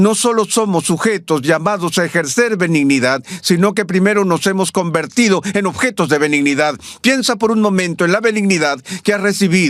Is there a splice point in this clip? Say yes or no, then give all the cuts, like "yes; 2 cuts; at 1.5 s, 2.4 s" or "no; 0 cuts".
no; 0 cuts